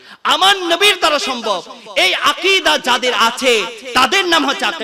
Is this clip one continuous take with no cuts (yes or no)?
yes